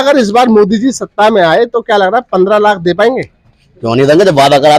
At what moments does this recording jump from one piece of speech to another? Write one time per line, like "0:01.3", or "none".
none